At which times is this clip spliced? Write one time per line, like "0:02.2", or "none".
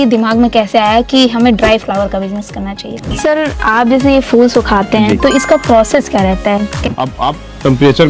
0:03.2
0:06.8